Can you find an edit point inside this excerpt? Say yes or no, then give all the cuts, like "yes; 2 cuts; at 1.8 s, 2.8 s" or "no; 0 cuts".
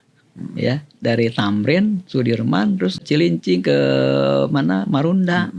yes; 1 cut; at 3.0 s